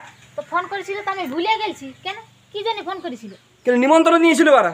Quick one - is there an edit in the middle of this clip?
no; 0 cuts

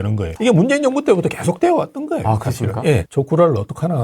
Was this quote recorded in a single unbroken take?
no; 1 cut; at 3.1 s

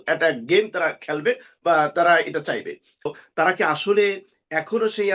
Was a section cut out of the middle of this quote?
yes; 1 cut; at 3.2 s

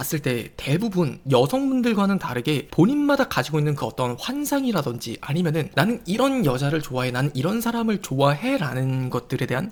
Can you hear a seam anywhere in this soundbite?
no; 0 cuts

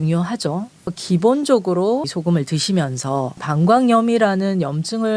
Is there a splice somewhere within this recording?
no; 0 cuts

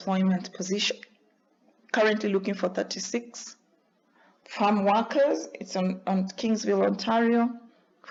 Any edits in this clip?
no; 0 cuts

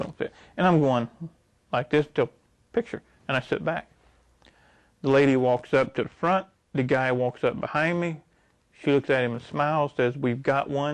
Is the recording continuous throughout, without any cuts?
yes; 0 cuts

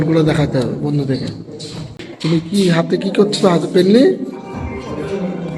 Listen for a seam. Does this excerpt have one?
yes; 1 cut; at 2.0 s

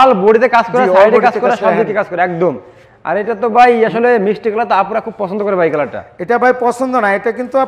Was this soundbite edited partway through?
no; 0 cuts

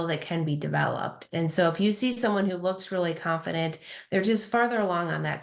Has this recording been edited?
no; 0 cuts

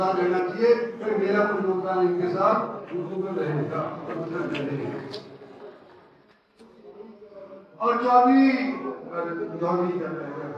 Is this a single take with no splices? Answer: yes; 0 cuts

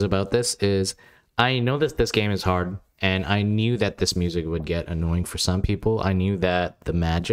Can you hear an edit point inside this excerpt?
no; 0 cuts

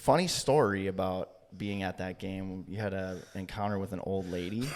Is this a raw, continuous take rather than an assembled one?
yes; 0 cuts

